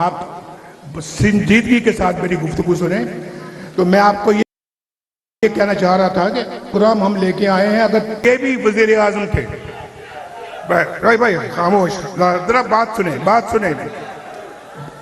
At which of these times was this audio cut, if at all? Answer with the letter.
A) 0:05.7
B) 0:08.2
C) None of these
B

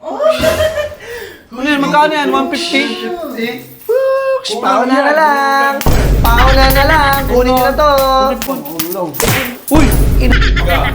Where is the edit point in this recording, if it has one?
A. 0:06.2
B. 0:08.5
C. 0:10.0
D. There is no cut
B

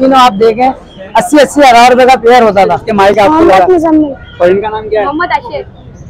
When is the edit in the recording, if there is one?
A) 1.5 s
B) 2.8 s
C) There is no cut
B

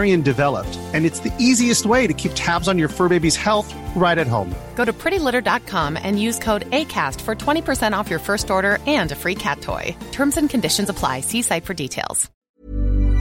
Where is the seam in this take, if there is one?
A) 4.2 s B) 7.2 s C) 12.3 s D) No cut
C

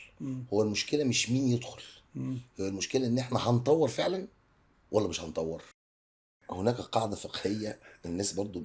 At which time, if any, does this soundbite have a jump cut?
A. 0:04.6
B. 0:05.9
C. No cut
B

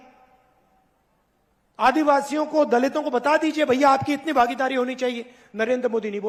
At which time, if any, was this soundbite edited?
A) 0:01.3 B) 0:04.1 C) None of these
C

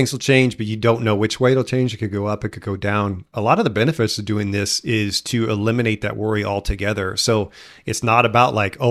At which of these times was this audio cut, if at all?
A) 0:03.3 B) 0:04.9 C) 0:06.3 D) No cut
D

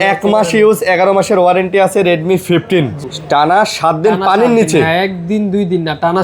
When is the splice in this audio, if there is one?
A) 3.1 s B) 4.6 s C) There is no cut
A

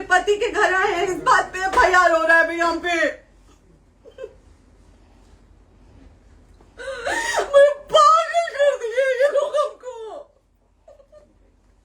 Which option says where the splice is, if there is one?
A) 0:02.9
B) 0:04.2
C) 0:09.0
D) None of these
D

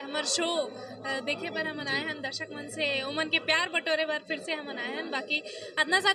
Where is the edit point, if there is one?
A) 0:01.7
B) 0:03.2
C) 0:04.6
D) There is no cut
D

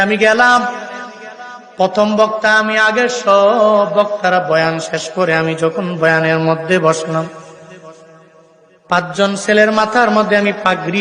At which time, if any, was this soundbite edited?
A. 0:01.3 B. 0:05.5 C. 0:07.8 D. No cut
D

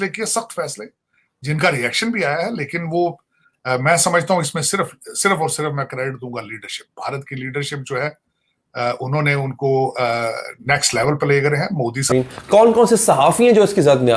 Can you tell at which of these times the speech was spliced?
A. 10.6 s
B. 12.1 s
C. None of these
B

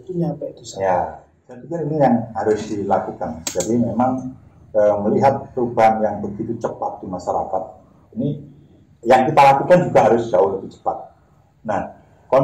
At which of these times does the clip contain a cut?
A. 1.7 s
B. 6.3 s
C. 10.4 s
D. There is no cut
A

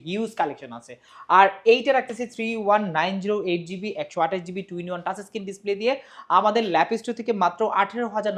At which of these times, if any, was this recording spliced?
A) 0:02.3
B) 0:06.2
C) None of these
C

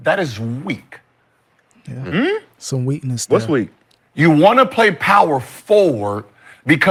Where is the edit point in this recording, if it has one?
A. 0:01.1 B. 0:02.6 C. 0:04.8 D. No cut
D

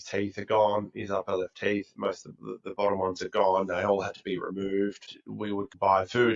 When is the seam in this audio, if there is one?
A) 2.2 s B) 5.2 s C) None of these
B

